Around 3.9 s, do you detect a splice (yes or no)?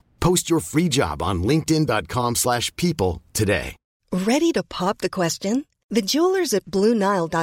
yes